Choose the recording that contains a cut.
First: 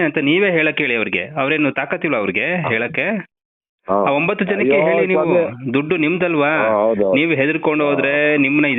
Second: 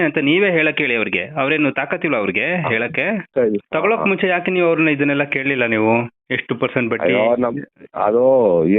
second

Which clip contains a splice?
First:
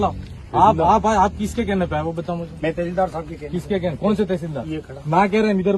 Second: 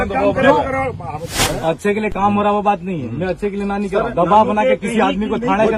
second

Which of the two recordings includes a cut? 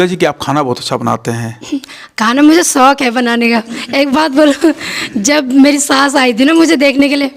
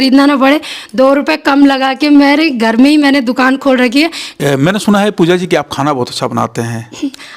second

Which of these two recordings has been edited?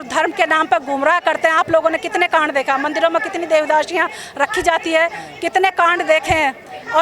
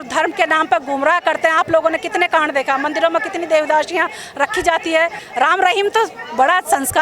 second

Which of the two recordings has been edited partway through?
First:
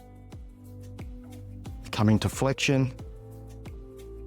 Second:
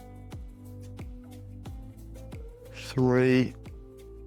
first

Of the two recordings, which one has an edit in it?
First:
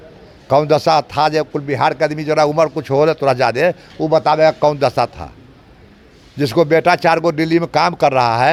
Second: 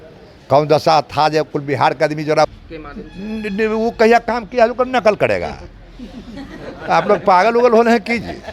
second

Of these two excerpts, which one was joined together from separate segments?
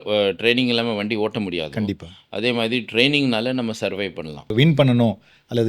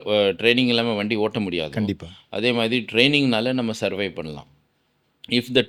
first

